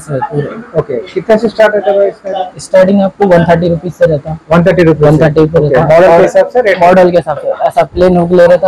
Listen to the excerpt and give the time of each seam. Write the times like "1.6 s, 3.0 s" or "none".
none